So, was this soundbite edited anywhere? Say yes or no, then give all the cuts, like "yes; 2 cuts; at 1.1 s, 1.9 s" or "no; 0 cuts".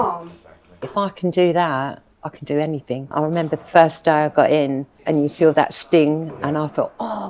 yes; 3 cuts; at 0.8 s, 3.1 s, 4.9 s